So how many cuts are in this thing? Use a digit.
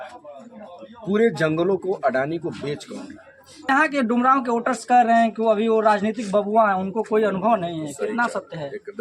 1